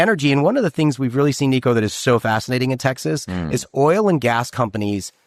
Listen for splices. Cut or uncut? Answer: uncut